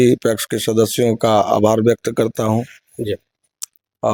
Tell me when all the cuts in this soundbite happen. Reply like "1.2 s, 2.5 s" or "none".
none